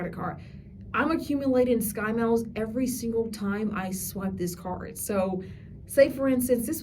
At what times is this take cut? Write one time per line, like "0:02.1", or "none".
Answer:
none